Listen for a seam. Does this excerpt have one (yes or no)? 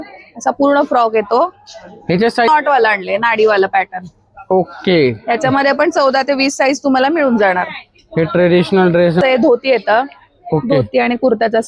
yes